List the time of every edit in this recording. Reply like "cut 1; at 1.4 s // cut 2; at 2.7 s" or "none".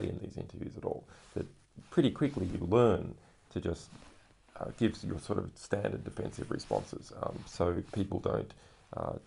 cut 1; at 6.1 s